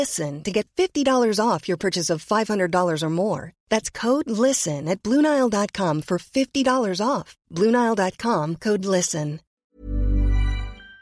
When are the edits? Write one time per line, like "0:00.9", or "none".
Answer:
0:09.5